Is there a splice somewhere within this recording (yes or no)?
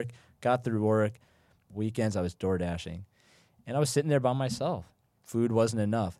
yes